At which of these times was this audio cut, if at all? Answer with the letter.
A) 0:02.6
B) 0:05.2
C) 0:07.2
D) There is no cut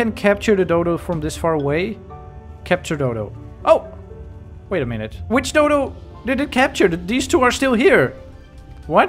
B